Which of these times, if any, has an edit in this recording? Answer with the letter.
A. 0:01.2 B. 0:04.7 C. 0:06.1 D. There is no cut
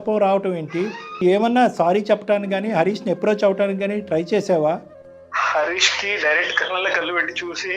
A